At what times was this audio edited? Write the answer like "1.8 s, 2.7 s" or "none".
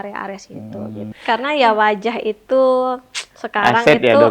1.2 s